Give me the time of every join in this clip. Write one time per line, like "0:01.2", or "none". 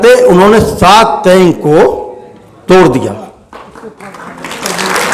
none